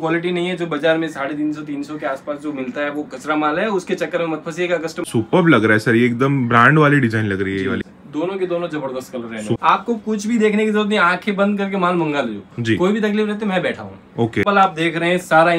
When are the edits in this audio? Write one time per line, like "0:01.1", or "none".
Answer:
0:05.1
0:07.9
0:09.6
0:14.4